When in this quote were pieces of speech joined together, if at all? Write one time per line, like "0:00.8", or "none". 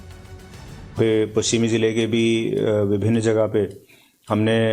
0:01.6